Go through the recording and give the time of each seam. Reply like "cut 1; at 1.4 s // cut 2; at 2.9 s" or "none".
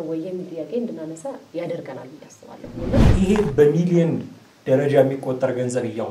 cut 1; at 3.0 s